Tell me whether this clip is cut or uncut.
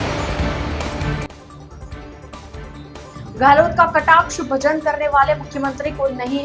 uncut